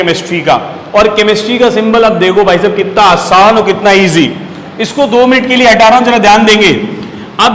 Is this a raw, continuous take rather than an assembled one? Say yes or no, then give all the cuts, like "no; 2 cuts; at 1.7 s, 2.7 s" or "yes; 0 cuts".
yes; 0 cuts